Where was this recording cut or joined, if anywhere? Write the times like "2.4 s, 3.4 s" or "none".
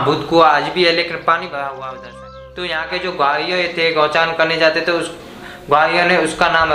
1.9 s